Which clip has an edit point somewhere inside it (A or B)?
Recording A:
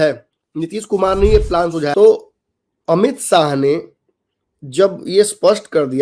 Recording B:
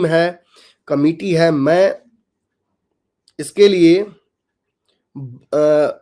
A